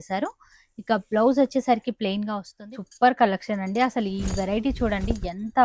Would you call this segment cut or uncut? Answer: cut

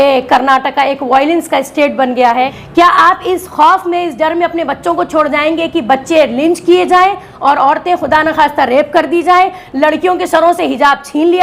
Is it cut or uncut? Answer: cut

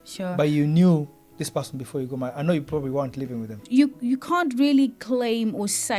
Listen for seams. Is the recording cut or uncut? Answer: cut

